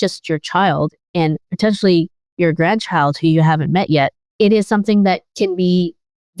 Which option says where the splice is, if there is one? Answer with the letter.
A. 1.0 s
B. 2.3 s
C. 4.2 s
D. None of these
C